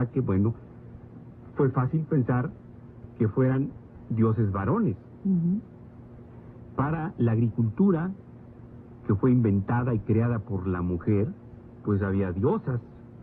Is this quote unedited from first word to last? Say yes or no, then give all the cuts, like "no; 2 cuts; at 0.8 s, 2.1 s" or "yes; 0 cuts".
no; 1 cut; at 7.5 s